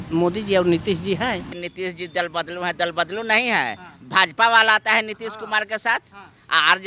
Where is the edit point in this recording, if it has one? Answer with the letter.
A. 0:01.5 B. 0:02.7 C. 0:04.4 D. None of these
A